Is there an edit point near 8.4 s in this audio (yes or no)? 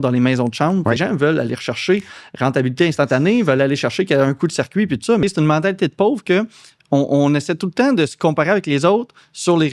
no